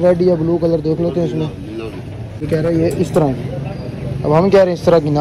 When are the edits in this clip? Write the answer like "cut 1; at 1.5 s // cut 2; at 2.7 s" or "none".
cut 1; at 2.4 s